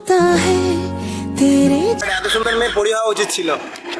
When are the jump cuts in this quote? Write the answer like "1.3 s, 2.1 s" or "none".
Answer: 2.0 s